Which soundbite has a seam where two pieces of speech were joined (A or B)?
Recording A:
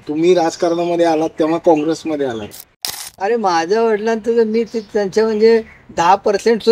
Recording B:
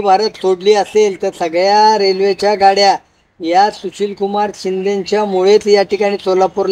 A